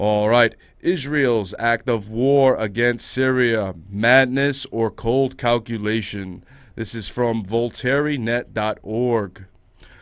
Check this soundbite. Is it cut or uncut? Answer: uncut